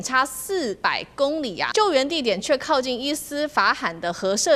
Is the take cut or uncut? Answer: cut